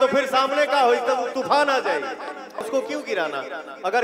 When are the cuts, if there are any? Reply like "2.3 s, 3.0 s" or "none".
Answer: 2.6 s